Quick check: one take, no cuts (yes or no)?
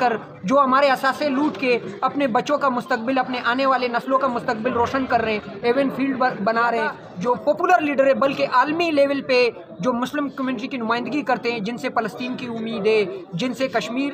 no